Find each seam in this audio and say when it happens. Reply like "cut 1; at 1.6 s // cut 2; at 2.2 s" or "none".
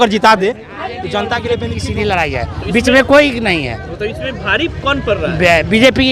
cut 1; at 1.7 s